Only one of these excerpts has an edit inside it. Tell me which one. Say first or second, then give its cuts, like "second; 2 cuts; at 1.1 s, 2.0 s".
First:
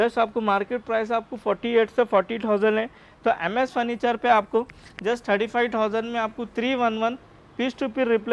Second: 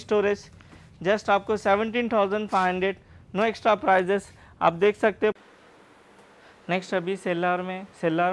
second; 1 cut; at 5.4 s